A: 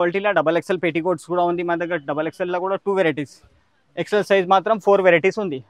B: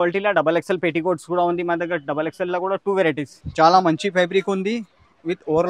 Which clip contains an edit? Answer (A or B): B